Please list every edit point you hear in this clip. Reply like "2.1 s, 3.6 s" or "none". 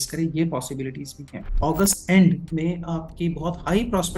1.6 s